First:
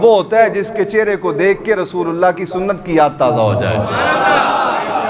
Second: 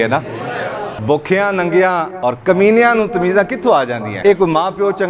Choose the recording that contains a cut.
second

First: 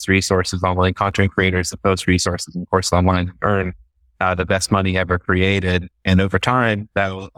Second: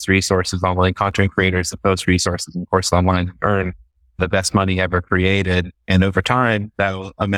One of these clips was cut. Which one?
second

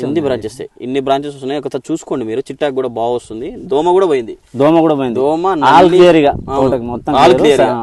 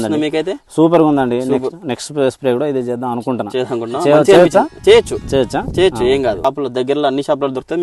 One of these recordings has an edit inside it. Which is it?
second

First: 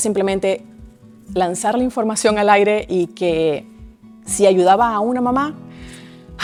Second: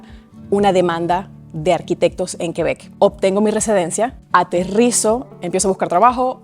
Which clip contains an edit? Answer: second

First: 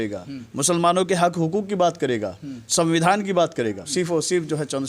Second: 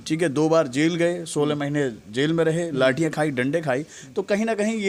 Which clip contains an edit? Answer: first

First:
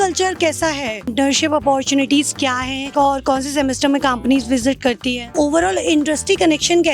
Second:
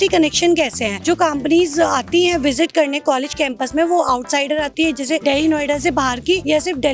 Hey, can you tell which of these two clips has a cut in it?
first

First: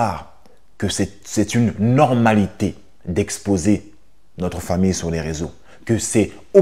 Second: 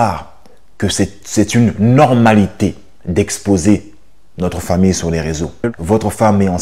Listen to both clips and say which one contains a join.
second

